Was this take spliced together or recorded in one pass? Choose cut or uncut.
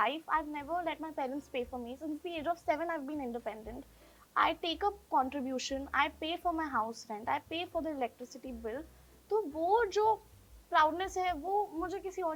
uncut